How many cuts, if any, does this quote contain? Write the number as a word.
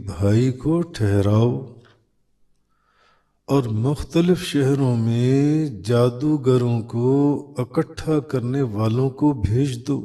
zero